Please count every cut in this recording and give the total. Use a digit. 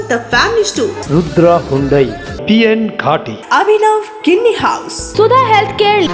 1